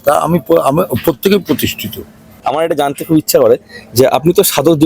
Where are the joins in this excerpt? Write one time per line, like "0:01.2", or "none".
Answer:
0:02.2

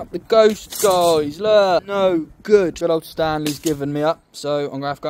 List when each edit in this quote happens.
0:01.9
0:02.8

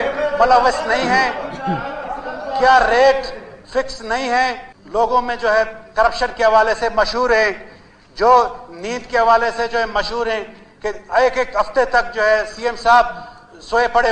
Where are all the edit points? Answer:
0:05.0

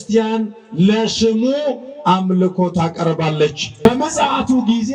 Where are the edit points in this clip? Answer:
0:03.9

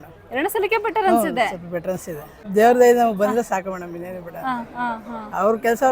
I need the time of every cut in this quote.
0:02.4

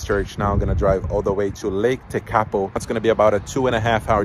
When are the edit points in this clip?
0:02.8

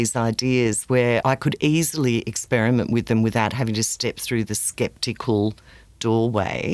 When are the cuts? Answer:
0:01.2

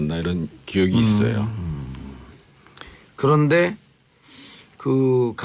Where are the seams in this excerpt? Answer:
0:02.0

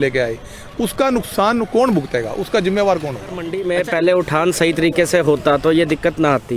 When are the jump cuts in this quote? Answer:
0:03.5

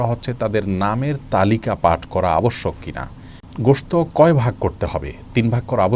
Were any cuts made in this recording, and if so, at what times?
0:03.4

